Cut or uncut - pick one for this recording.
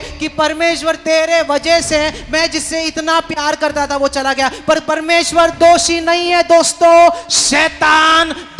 uncut